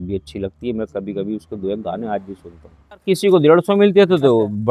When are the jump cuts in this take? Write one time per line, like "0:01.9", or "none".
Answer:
0:03.0